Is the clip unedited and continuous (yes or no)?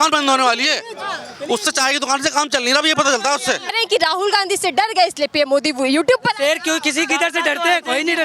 no